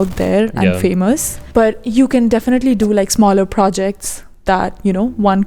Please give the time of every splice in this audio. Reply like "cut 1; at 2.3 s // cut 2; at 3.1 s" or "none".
cut 1; at 1.4 s